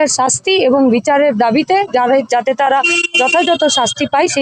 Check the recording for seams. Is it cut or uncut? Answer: uncut